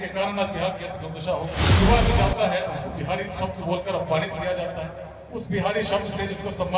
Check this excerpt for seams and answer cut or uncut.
cut